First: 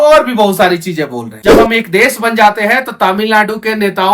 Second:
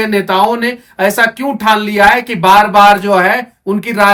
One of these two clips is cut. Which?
first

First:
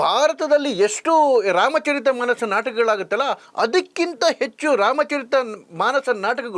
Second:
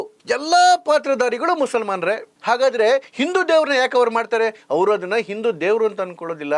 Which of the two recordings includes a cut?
first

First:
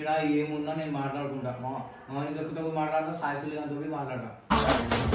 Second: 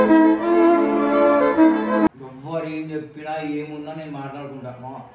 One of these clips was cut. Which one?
second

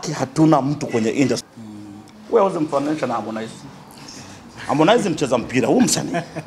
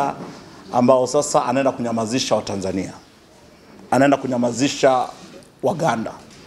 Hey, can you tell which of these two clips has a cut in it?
first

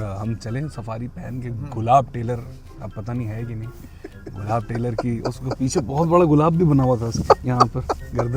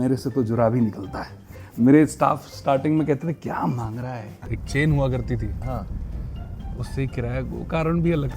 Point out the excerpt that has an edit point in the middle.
second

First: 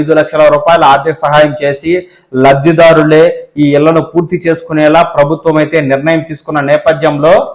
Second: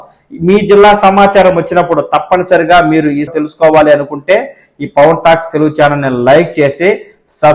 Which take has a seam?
second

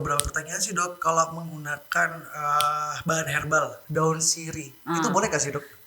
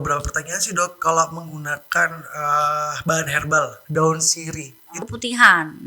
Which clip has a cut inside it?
second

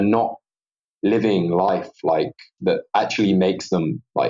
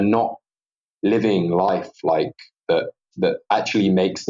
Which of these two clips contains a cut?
first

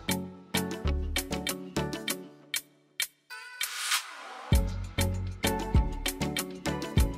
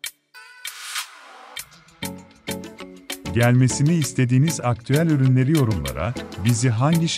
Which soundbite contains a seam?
second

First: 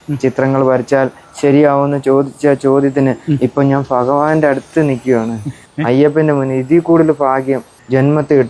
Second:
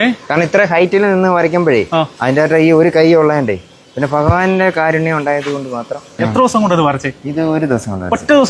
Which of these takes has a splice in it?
second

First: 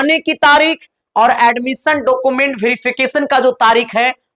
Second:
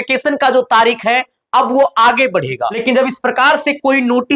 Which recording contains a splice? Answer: second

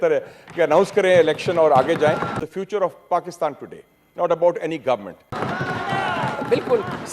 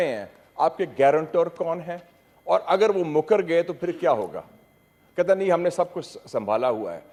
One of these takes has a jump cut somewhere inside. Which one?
first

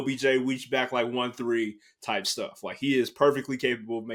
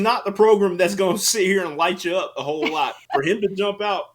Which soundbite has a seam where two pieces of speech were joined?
second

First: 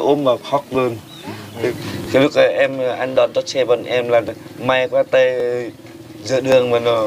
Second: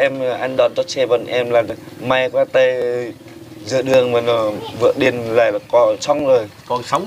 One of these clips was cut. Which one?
first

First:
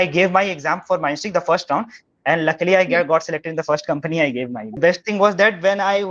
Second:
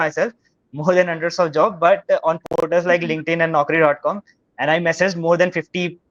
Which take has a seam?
first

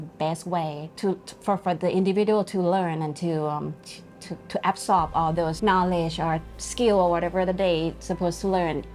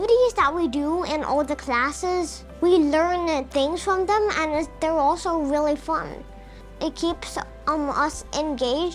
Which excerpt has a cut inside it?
second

